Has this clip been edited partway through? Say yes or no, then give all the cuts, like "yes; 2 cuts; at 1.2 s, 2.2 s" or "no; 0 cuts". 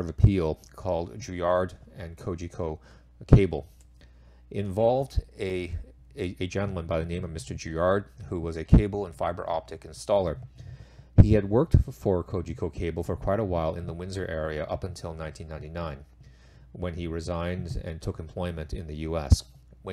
no; 0 cuts